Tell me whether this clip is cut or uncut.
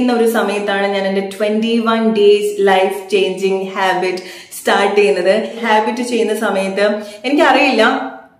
cut